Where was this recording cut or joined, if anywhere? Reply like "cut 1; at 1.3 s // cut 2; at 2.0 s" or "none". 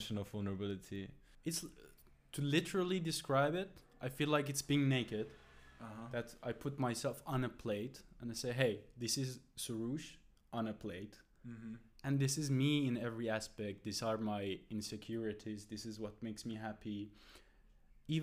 cut 1; at 1.2 s